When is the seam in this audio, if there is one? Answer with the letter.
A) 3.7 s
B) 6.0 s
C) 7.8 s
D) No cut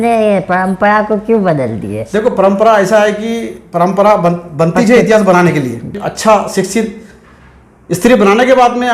B